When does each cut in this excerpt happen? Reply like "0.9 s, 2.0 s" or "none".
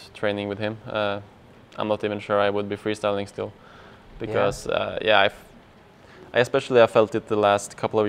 none